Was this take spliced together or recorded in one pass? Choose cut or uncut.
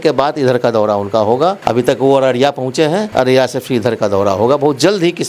cut